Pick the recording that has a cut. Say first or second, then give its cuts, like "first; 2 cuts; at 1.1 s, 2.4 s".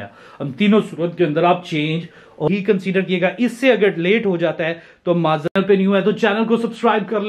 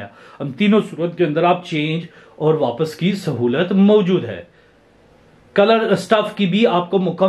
first; 2 cuts; at 2.5 s, 5.5 s